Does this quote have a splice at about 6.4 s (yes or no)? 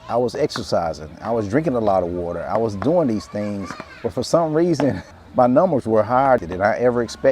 yes